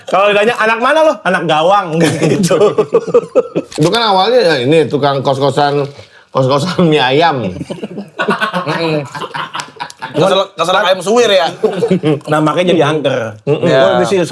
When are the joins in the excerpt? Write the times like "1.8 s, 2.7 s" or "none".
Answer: 3.7 s